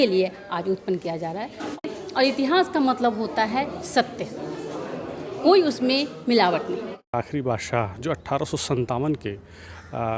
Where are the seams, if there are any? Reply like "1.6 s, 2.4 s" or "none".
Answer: 1.8 s, 6.8 s